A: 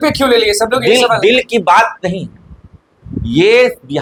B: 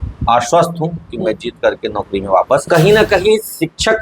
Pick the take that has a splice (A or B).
B